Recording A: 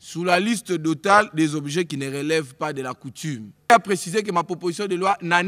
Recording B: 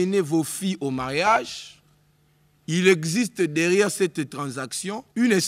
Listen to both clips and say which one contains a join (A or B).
A